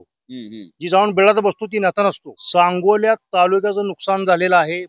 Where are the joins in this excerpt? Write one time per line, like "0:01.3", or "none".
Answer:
0:02.3

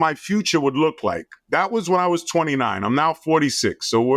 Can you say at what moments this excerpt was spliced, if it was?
none

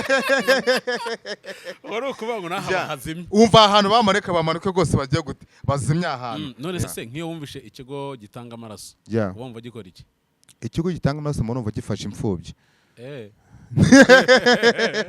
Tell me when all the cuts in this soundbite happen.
0:06.8

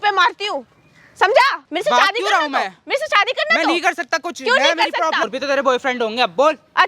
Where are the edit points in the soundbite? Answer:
0:01.6
0:05.3

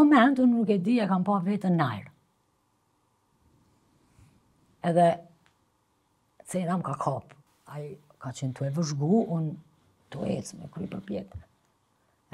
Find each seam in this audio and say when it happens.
none

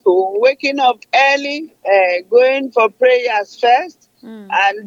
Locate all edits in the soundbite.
none

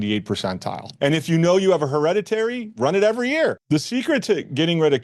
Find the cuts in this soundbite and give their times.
0:00.9
0:03.6

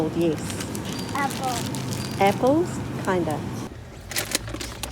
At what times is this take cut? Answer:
0:03.7

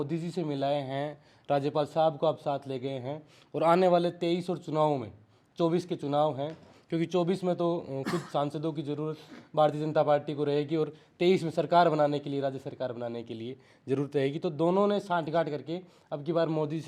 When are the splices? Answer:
none

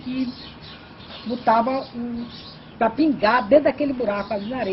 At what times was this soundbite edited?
none

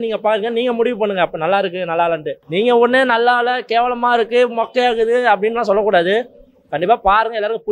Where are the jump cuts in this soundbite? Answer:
0:02.4

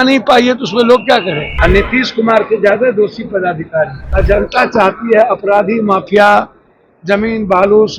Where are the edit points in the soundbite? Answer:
0:01.5
0:04.0

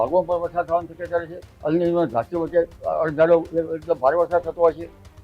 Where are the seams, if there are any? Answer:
0:01.4

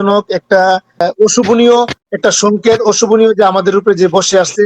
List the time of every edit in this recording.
0:01.0

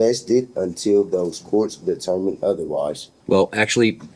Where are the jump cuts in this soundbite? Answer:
0:03.1

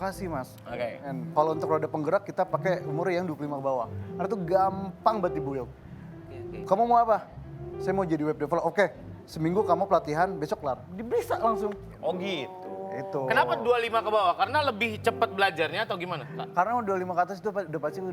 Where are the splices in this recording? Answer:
0:01.0
0:11.9

